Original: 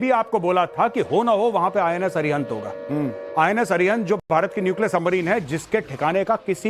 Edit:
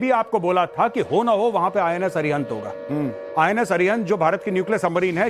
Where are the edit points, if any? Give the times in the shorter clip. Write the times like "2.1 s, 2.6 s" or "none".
4.2 s